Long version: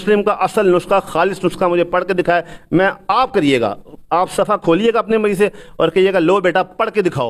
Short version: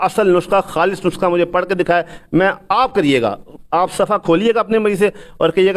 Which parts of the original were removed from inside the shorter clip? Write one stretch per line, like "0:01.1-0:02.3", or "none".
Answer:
none